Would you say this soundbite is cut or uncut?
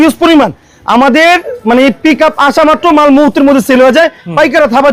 uncut